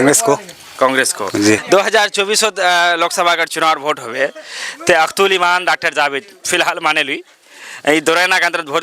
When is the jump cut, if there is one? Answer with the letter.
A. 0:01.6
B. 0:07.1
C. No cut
A